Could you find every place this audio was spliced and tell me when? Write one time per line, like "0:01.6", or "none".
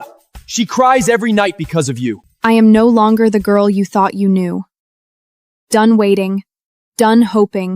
0:02.2